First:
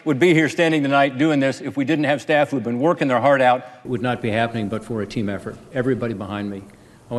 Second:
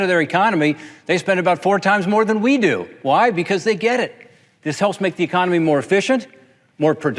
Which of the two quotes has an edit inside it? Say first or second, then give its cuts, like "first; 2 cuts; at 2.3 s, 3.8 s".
first; 1 cut; at 3.8 s